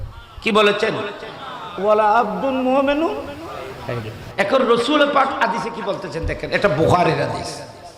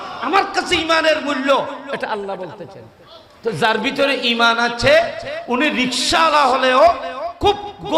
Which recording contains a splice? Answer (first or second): first